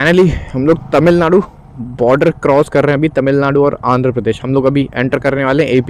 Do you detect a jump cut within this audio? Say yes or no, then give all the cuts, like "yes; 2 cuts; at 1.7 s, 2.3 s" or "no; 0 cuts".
no; 0 cuts